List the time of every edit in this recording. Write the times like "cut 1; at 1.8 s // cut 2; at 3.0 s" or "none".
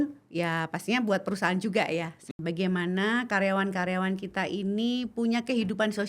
cut 1; at 2.2 s